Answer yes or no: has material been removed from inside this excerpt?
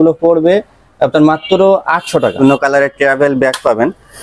yes